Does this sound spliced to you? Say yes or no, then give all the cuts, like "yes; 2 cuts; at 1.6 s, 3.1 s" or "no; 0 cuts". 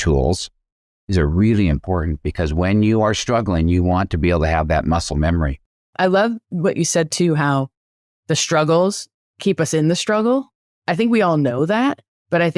yes; 1 cut; at 5.7 s